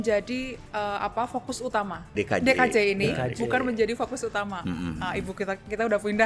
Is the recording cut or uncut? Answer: cut